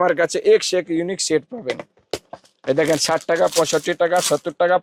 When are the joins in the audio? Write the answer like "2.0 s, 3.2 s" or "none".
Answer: none